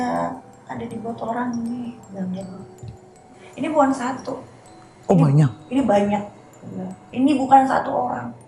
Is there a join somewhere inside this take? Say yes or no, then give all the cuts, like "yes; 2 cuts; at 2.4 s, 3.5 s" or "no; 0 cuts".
yes; 1 cut; at 3.4 s